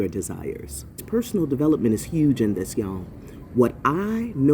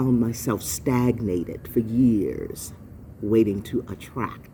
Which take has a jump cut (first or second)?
first